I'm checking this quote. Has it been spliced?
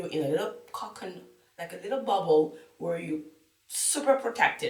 no; 0 cuts

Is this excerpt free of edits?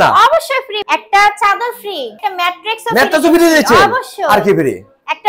no; 2 cuts; at 0.8 s, 2.2 s

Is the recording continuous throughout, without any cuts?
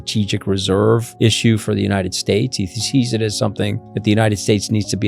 no; 2 cuts; at 1.1 s, 3.9 s

